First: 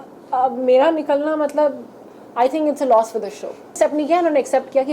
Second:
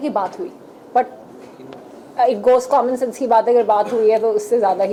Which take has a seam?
first; 1 cut; at 3.8 s

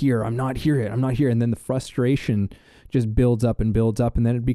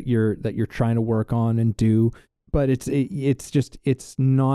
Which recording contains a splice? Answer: second; 1 cut; at 2.3 s

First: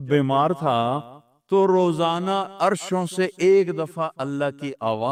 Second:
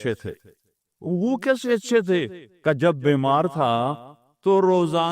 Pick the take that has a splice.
second; 1 cut; at 1.0 s

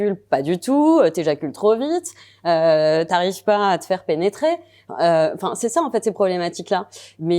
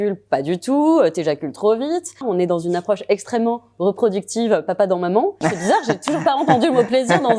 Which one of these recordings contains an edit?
second; 2 cuts; at 2.2 s, 5.4 s

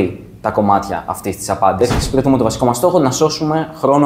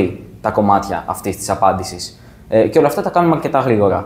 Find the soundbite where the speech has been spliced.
first; 1 cut; at 1.8 s

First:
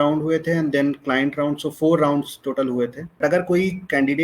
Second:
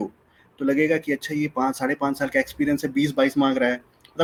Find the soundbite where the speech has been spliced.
first; 1 cut; at 3.2 s

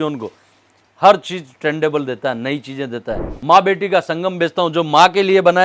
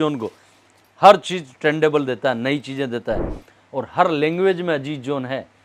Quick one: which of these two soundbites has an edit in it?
first; 1 cut; at 3.3 s

